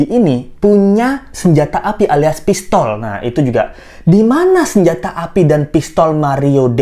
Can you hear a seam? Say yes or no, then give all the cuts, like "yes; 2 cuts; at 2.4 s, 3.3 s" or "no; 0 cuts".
no; 0 cuts